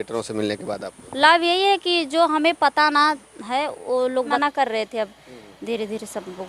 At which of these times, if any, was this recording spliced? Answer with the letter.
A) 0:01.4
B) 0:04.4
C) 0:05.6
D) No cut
B